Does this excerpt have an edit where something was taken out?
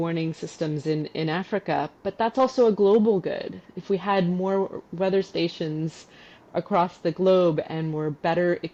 no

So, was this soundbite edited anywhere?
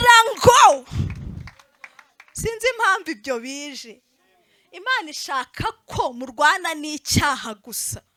no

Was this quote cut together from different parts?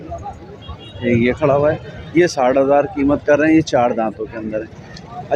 no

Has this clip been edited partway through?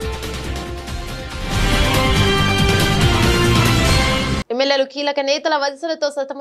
yes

